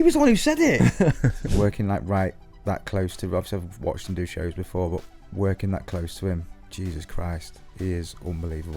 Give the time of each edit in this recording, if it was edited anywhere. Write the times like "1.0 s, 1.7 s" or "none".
1.4 s